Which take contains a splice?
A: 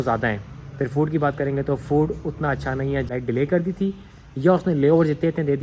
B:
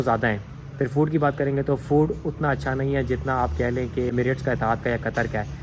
A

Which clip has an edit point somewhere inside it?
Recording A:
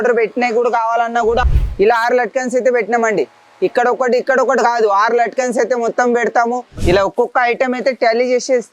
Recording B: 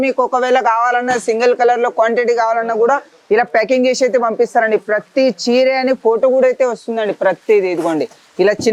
A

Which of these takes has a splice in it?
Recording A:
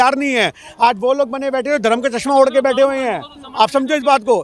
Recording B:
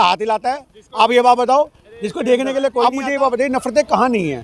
B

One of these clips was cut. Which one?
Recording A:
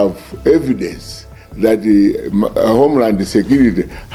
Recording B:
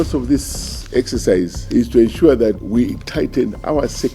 B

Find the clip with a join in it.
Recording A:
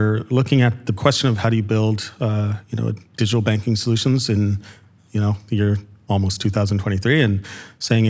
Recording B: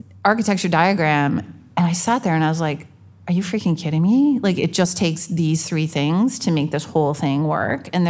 A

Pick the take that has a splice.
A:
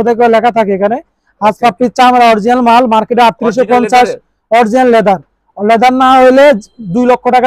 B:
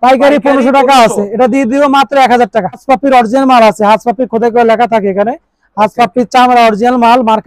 B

